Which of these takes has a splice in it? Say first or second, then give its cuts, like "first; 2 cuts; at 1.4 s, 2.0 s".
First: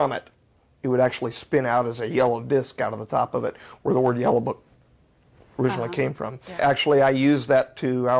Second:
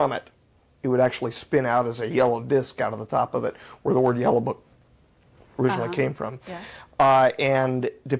first; 1 cut; at 6.6 s